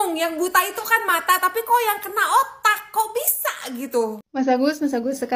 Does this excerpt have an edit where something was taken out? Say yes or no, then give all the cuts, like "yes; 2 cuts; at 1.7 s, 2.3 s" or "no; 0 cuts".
yes; 1 cut; at 4.2 s